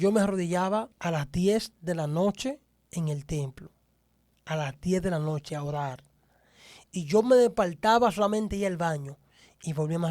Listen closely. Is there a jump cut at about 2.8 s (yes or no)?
no